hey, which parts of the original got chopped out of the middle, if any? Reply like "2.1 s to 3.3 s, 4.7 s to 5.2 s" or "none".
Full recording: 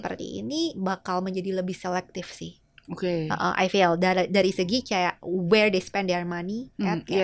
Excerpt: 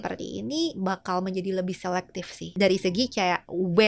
2.5 s to 4.3 s